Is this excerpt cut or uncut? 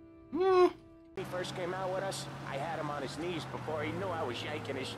cut